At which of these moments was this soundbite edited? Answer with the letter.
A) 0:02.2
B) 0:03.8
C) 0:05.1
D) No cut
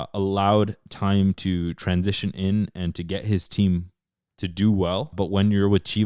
C